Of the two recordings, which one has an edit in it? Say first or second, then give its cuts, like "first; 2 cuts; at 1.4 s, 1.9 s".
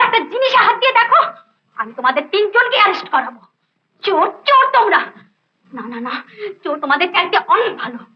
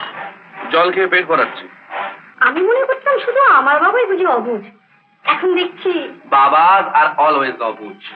second; 1 cut; at 2.2 s